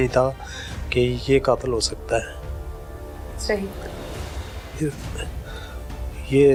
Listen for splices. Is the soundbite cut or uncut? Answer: uncut